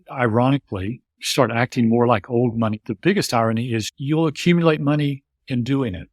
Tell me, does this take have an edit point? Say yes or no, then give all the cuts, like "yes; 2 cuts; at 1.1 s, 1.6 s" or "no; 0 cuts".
yes; 2 cuts; at 2.9 s, 3.9 s